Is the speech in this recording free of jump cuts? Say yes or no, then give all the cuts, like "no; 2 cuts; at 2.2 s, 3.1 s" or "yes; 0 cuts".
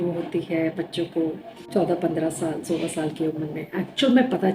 no; 1 cut; at 1.5 s